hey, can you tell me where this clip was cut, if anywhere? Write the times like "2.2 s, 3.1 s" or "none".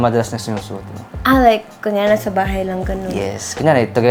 none